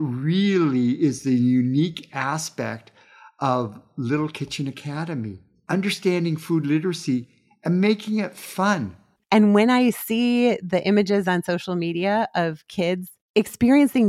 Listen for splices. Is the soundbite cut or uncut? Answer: cut